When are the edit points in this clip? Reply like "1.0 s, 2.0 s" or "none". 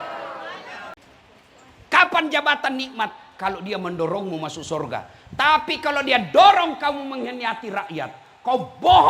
1.0 s